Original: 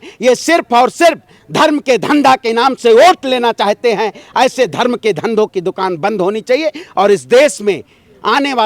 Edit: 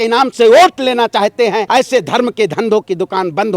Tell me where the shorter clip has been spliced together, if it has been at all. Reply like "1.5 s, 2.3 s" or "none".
1.6 s